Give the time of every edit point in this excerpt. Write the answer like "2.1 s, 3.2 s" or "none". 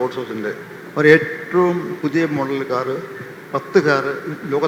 none